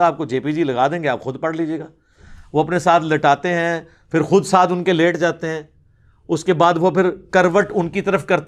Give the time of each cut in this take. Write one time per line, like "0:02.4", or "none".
none